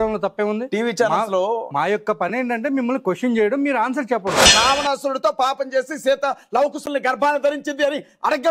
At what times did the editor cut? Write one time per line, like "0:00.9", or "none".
0:04.5